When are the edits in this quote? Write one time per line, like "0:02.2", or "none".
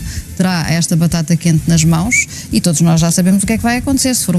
none